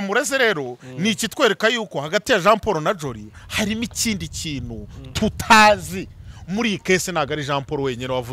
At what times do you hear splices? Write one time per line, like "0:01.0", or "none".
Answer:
none